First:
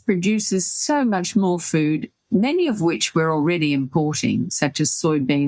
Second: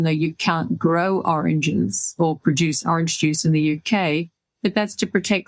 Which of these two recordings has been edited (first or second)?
second